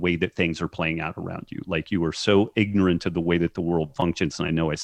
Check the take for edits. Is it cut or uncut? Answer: uncut